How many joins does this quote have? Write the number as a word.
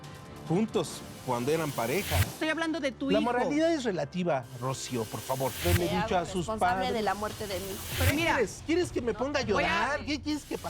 three